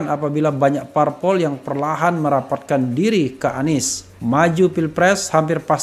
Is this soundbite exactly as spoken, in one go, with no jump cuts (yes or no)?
yes